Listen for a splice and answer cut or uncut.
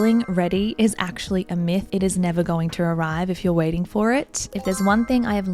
cut